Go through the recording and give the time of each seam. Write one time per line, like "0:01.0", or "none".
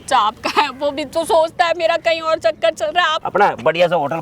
0:03.2